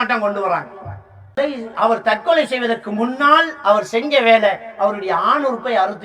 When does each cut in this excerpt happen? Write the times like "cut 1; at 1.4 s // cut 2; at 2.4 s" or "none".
cut 1; at 1.4 s